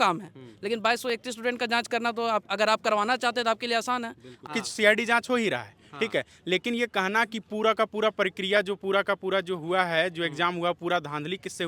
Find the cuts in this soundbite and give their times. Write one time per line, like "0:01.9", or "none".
0:04.4